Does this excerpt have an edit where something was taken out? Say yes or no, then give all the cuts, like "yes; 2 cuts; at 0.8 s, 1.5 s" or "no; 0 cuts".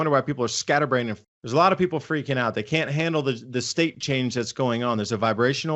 yes; 1 cut; at 1.2 s